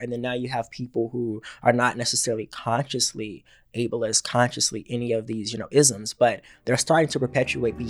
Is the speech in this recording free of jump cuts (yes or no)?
yes